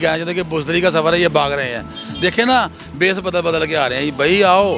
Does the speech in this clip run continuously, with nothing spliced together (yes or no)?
yes